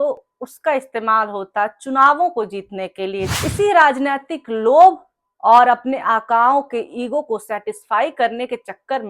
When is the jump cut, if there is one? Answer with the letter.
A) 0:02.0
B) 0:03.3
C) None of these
B